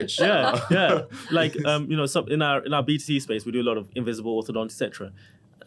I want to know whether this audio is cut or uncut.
uncut